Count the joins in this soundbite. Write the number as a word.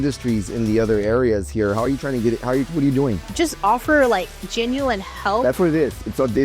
one